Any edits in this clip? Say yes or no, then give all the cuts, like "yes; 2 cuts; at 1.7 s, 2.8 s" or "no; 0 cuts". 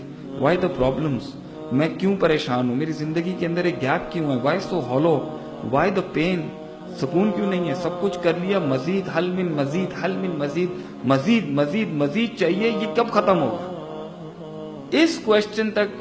no; 0 cuts